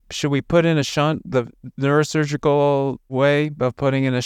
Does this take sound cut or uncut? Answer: uncut